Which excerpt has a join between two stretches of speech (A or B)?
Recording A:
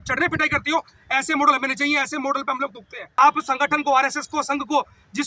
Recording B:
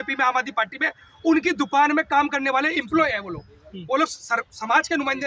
A